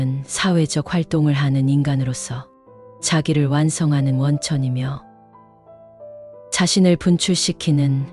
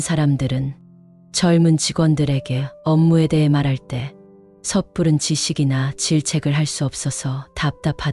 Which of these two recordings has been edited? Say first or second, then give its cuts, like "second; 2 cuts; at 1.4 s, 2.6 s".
first; 2 cuts; at 5.0 s, 6.5 s